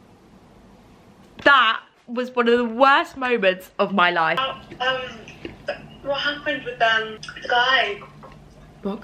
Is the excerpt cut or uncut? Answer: cut